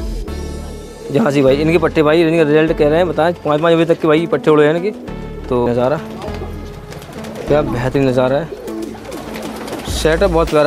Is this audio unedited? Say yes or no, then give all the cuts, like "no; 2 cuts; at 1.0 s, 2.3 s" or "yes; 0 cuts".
no; 1 cut; at 5.7 s